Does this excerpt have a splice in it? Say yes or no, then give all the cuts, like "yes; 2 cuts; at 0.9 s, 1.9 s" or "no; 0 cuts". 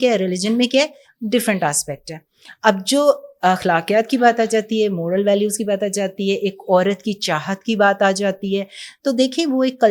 no; 0 cuts